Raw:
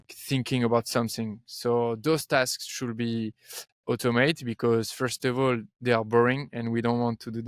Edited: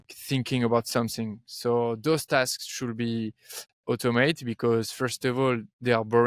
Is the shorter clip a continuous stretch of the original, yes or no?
yes